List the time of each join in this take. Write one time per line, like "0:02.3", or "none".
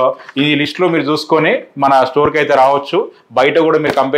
none

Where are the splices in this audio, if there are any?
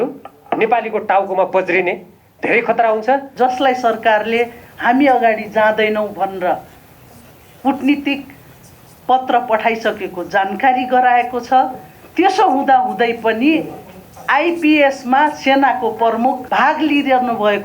0:03.3
0:16.4

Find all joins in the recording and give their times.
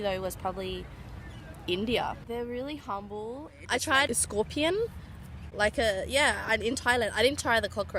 0:02.2
0:03.7

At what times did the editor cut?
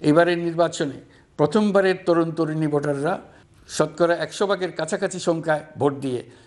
none

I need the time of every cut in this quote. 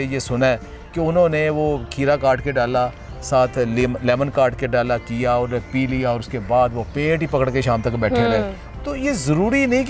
0:08.6

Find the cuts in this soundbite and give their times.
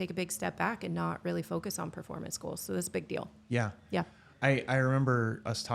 none

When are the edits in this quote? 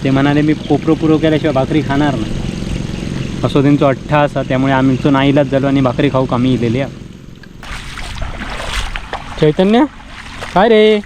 0:07.6

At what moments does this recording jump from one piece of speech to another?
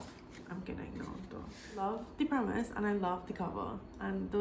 0:01.9

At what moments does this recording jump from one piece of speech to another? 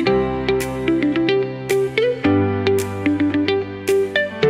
none

